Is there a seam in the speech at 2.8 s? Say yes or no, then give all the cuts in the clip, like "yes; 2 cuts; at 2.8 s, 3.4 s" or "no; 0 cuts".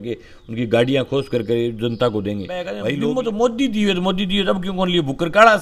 yes; 1 cut; at 2.8 s